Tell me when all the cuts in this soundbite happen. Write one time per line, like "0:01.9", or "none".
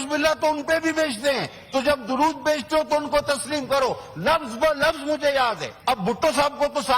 0:05.7